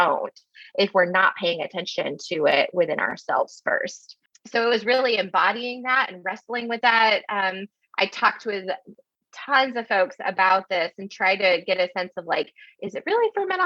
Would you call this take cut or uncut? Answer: uncut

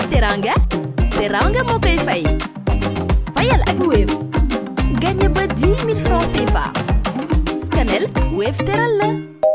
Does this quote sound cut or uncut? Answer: uncut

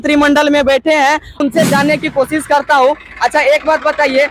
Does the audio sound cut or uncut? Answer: cut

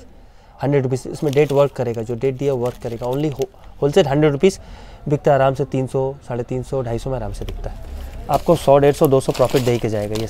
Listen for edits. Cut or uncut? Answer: uncut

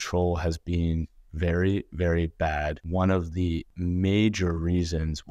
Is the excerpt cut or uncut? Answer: cut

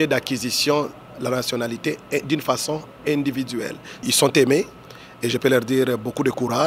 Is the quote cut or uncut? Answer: cut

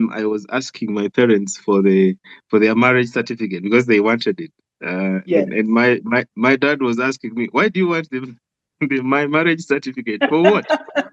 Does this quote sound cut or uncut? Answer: uncut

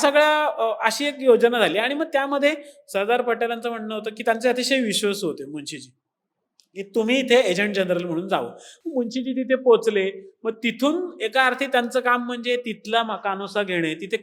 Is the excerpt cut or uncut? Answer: uncut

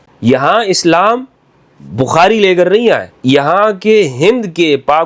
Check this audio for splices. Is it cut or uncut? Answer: cut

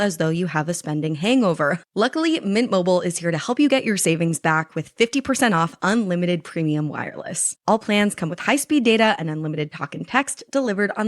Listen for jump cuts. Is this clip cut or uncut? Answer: cut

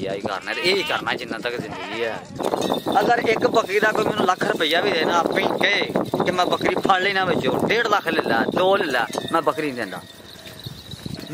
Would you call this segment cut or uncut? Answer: cut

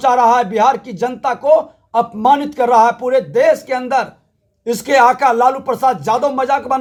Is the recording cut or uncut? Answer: uncut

